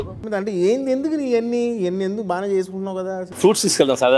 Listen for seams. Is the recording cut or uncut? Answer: cut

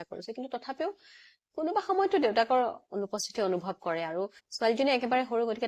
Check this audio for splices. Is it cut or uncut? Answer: uncut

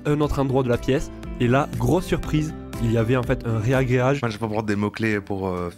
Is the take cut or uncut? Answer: cut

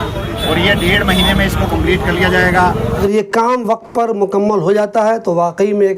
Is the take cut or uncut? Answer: cut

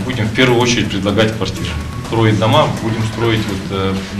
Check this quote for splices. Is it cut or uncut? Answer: uncut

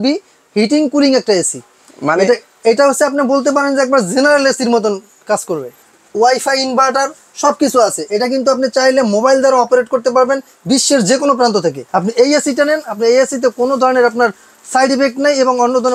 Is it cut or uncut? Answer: cut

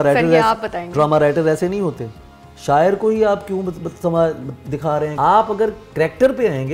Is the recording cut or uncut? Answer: cut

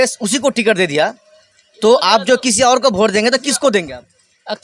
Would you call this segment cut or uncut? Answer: uncut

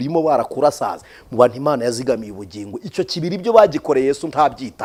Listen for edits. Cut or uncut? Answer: uncut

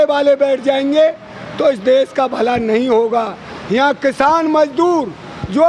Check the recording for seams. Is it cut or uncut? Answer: uncut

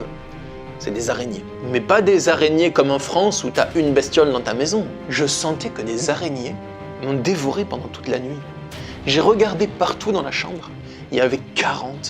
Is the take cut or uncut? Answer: cut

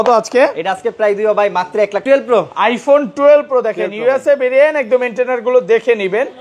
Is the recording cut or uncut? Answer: cut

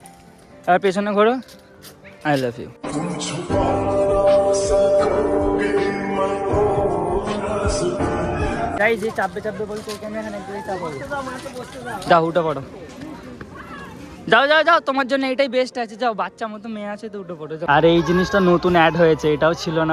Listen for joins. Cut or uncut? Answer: cut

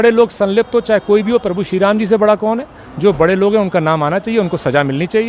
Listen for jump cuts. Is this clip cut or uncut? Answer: uncut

